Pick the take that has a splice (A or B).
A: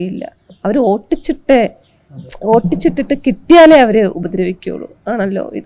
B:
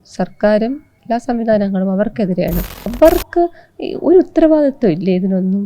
B